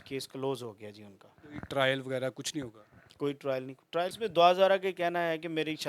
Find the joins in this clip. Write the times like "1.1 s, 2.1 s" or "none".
4.2 s